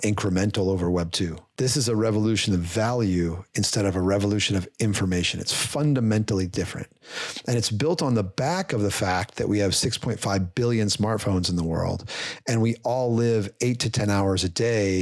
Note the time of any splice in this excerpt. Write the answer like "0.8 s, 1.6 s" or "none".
1.4 s

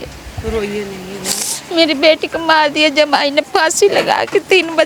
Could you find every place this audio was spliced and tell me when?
none

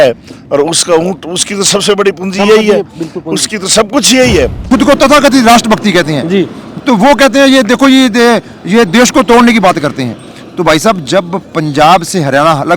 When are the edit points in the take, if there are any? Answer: 4.7 s

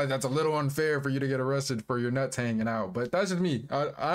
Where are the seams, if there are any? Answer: none

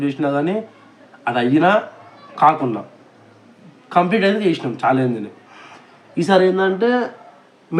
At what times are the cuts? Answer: none

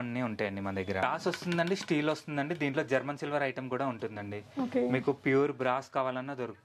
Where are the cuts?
1.0 s

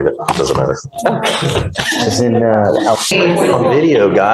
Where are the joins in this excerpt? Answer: 3.1 s

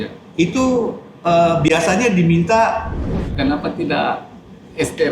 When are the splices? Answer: 3.2 s

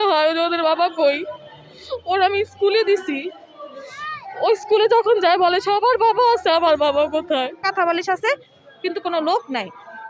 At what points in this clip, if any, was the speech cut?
7.6 s

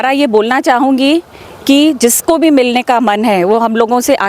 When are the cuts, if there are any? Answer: none

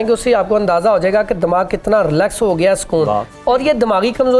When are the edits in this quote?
none

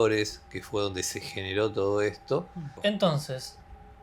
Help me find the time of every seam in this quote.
2.6 s

